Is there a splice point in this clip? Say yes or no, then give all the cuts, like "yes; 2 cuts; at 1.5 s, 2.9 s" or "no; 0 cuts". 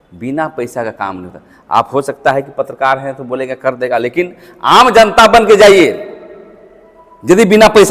no; 0 cuts